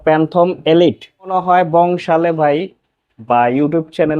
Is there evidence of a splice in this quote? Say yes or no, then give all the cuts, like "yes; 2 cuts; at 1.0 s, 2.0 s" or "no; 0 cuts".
yes; 1 cut; at 1.3 s